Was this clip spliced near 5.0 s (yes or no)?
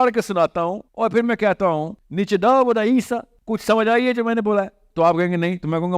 no